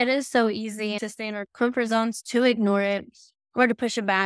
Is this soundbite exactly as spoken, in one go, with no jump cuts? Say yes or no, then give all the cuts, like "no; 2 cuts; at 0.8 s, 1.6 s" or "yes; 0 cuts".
no; 1 cut; at 1.0 s